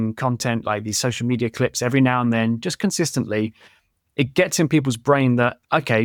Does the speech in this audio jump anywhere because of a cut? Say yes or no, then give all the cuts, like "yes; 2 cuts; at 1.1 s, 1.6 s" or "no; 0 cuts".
no; 0 cuts